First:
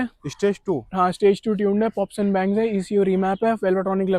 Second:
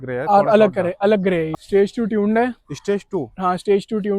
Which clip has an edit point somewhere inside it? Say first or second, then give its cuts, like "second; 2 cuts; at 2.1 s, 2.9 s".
second; 1 cut; at 1.5 s